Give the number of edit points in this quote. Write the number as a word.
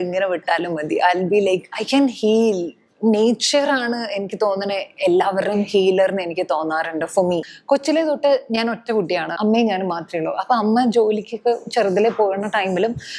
three